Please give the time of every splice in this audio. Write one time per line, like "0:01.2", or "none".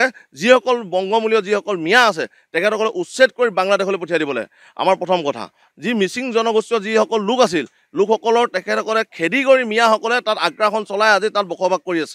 0:05.5